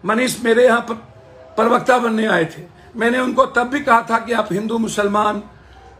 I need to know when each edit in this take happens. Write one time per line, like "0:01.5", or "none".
none